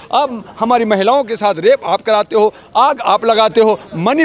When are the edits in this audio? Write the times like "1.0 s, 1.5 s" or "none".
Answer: none

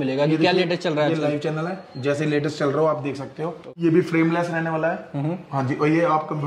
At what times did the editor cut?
3.7 s

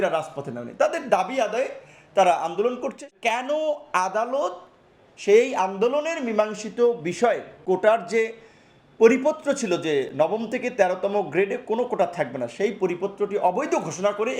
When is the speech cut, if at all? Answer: 3.1 s, 7.5 s

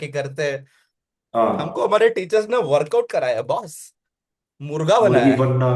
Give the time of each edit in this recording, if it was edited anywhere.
none

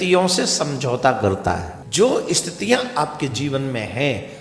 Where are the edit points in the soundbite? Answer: 1.8 s

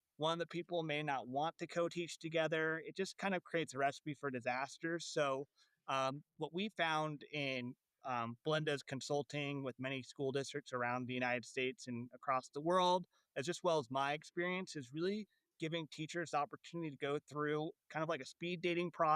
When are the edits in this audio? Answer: 17.8 s

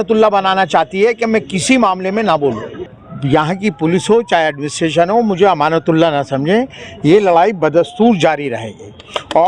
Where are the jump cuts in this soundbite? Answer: 2.9 s

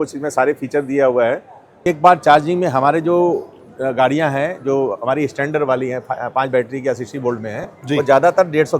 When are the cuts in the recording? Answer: 1.7 s

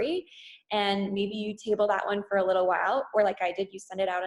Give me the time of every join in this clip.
none

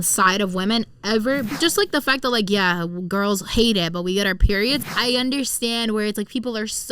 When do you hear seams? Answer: 1.5 s, 4.8 s

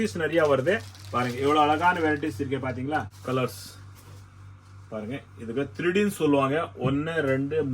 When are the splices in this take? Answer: 3.1 s

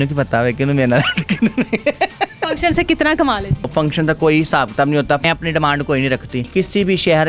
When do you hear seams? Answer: 2.5 s, 3.7 s, 5.2 s, 6.4 s

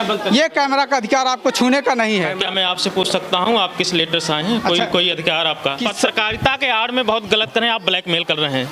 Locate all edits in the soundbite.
2.4 s, 5.8 s

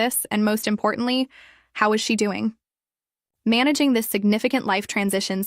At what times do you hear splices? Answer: 1.0 s

